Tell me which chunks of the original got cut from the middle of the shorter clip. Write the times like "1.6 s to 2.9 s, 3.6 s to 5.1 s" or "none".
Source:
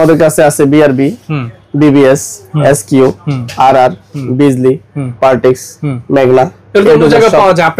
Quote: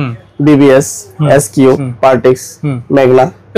3.2 s to 5.1 s